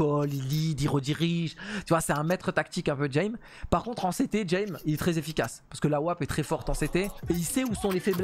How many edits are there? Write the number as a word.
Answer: one